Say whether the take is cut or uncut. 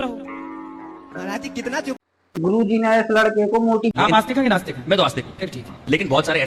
cut